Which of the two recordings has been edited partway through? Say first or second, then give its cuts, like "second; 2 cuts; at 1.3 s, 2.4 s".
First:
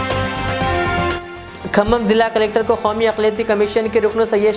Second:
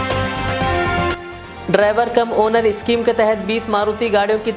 second; 1 cut; at 1.1 s